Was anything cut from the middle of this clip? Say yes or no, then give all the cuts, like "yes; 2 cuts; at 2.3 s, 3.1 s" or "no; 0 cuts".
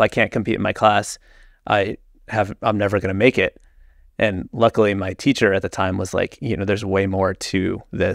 no; 0 cuts